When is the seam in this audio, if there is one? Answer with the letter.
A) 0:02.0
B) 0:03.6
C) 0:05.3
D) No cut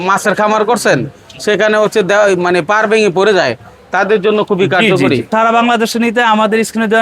C